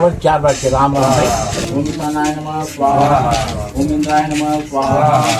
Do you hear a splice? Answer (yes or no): yes